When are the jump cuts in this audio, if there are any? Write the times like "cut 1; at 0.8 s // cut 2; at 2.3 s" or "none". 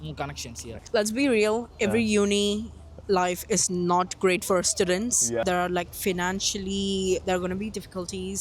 cut 1; at 0.8 s // cut 2; at 5.4 s